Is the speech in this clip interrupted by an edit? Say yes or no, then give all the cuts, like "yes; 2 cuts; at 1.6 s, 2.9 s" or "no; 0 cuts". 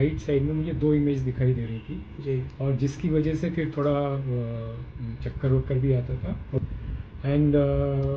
yes; 1 cut; at 6.6 s